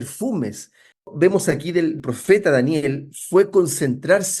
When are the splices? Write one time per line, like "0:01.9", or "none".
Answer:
0:01.1
0:02.0

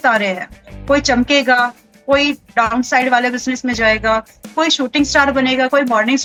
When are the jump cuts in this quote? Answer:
none

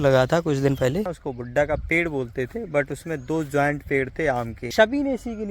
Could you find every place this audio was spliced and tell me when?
0:01.2
0:04.6

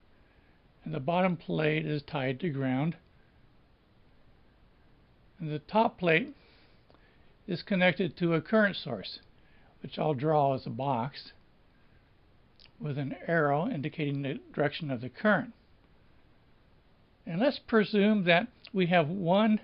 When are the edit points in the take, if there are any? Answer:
0:14.7

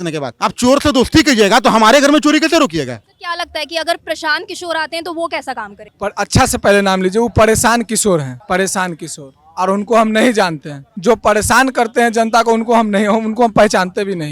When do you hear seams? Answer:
none

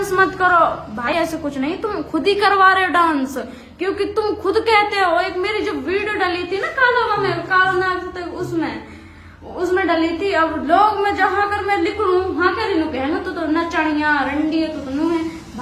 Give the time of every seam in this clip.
0:01.1

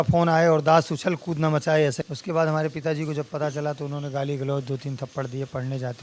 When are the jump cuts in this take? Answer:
0:02.0

